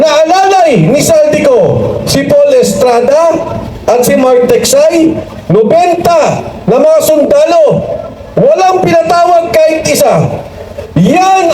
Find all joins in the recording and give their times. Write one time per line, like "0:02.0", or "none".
none